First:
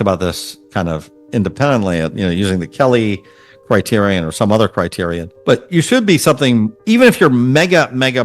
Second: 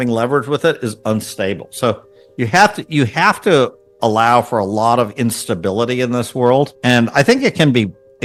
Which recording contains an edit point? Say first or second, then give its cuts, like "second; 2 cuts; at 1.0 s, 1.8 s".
first; 2 cuts; at 5.3 s, 6.8 s